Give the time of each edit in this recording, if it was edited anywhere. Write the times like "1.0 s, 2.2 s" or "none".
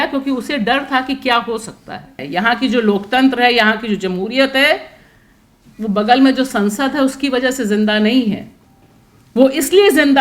2.2 s